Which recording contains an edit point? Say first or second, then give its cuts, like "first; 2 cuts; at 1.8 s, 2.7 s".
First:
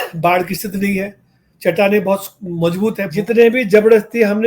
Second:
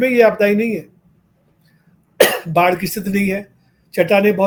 first; 1 cut; at 3.1 s